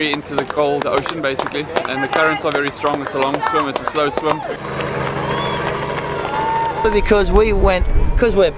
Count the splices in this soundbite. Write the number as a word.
zero